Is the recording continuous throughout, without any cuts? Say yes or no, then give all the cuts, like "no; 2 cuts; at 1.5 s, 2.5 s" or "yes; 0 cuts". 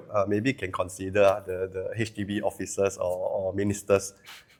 yes; 0 cuts